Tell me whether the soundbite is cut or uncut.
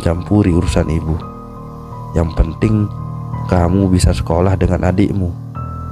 uncut